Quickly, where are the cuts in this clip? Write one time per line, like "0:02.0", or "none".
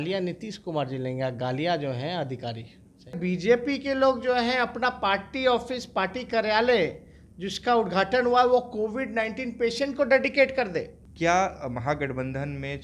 0:03.2
0:11.0